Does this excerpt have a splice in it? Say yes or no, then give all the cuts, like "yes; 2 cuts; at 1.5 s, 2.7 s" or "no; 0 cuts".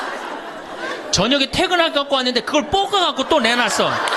no; 0 cuts